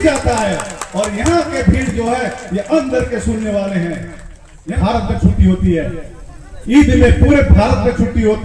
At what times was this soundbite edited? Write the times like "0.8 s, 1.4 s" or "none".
4.8 s